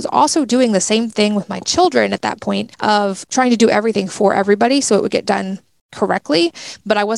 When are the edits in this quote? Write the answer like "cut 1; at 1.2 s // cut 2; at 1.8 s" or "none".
cut 1; at 3.0 s